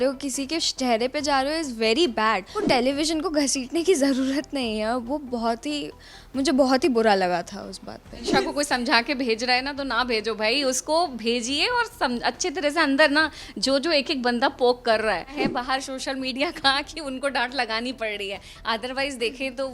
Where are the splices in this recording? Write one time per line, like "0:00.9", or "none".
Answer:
0:02.5
0:08.2
0:15.4